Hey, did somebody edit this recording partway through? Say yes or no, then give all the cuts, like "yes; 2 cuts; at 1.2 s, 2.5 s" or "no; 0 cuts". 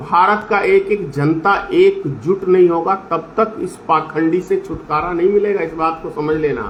no; 0 cuts